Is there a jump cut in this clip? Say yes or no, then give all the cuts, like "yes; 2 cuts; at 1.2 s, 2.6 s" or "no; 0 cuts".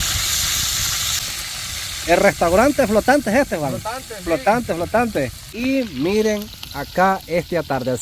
yes; 2 cuts; at 1.2 s, 5.4 s